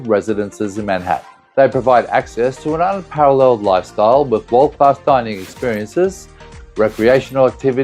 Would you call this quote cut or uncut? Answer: cut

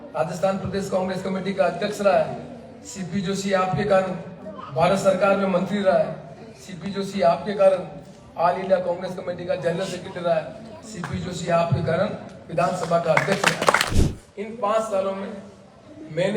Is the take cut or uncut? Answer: cut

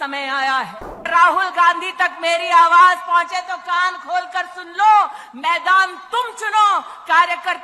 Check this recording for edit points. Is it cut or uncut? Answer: cut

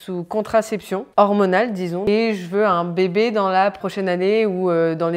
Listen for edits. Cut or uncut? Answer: cut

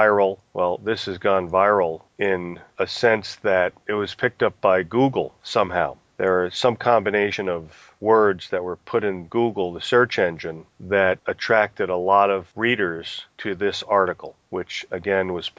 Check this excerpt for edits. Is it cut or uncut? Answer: uncut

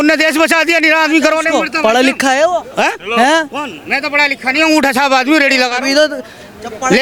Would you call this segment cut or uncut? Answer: uncut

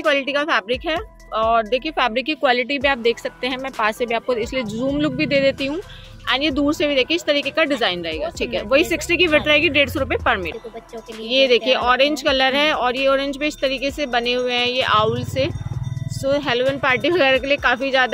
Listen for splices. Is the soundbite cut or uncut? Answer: uncut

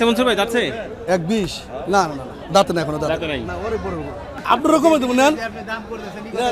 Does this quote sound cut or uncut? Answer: cut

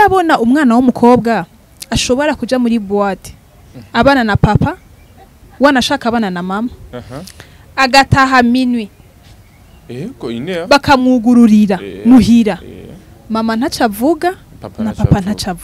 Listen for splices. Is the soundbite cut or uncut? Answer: uncut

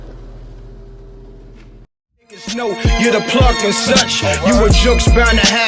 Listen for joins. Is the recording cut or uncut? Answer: uncut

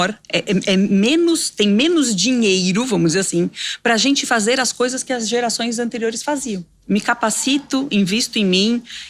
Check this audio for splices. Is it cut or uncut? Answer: cut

